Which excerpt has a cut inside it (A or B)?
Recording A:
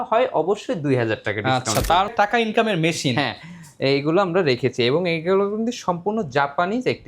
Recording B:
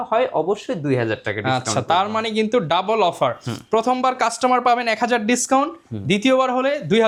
A